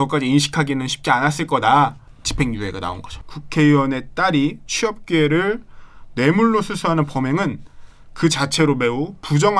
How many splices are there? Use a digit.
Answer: 2